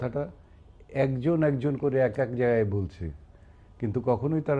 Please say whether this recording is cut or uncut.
uncut